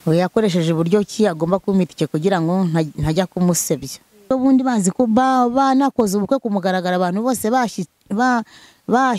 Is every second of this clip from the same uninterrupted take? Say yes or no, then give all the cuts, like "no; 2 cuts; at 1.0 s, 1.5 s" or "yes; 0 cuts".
no; 1 cut; at 4.3 s